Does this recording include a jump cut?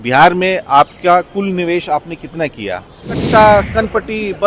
yes; 1 cut; at 3.2 s

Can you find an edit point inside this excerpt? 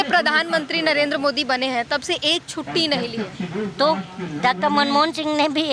no; 0 cuts

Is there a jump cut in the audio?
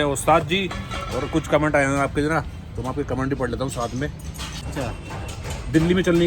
yes; 1 cut; at 4.7 s

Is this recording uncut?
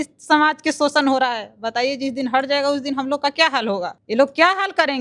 no; 1 cut; at 4.0 s

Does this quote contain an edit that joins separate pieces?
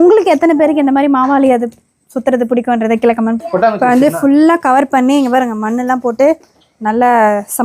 yes; 1 cut; at 3.4 s

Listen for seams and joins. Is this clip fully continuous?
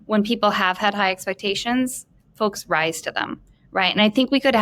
yes; 0 cuts

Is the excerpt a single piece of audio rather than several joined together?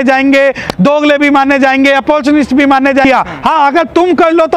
no; 1 cut; at 3.0 s

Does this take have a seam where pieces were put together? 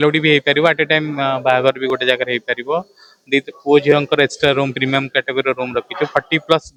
no; 0 cuts

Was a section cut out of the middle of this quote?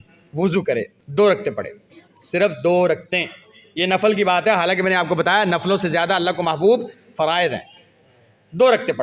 yes; 1 cut; at 1.0 s

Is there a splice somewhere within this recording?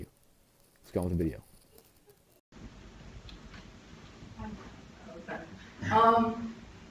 no; 0 cuts

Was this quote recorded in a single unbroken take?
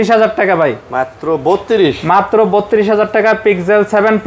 yes; 0 cuts

